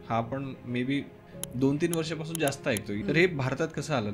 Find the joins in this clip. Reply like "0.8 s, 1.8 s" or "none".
1.2 s, 2.9 s